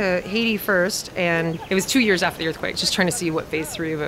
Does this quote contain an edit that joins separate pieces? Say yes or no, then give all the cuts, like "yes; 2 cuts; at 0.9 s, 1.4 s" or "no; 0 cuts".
yes; 2 cuts; at 1.6 s, 2.8 s